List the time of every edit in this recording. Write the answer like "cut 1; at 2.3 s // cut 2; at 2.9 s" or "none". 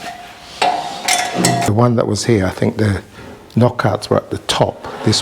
cut 1; at 1.7 s